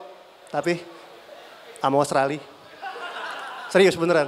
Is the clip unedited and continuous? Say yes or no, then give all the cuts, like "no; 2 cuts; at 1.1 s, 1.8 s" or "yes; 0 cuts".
yes; 0 cuts